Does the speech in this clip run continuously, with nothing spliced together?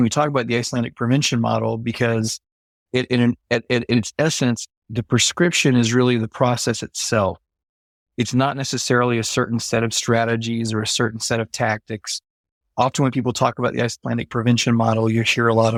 yes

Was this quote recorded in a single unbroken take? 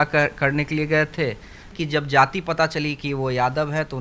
no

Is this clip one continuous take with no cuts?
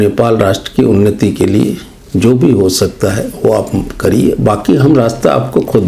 yes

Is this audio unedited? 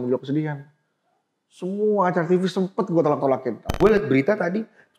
no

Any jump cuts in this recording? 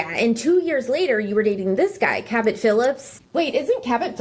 yes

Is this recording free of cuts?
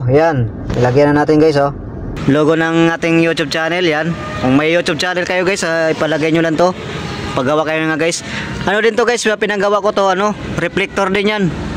no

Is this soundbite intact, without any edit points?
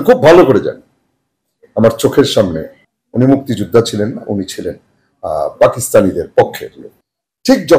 no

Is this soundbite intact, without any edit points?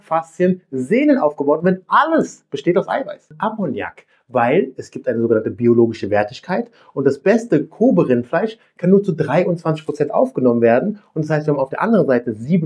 no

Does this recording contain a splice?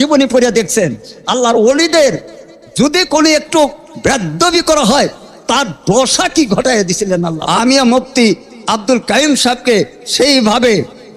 yes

